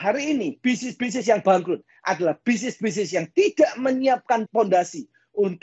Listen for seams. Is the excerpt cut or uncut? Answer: cut